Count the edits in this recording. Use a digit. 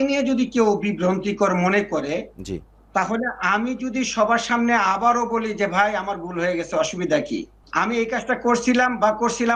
0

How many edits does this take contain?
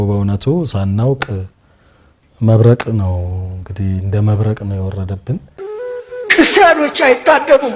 1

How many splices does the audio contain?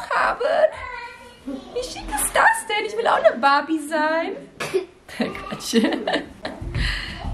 0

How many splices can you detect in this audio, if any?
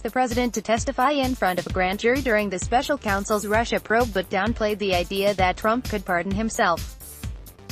1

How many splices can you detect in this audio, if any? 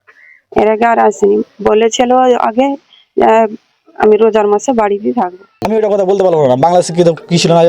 1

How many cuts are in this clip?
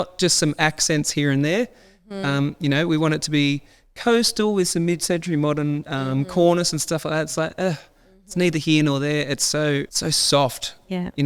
1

